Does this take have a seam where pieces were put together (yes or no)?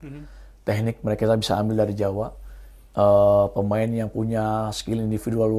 no